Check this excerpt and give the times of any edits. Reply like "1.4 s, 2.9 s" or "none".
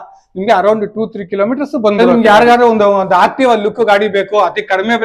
2.0 s